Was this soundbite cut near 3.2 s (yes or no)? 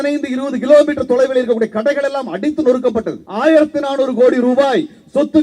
yes